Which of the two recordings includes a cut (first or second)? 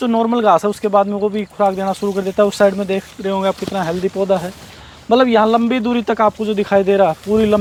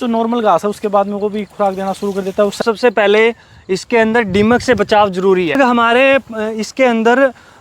second